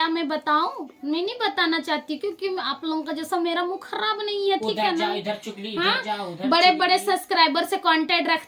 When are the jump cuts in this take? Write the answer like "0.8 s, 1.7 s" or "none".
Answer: none